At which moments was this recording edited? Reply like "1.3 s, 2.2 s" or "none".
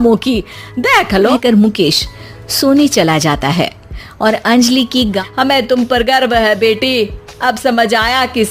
1.3 s, 5.2 s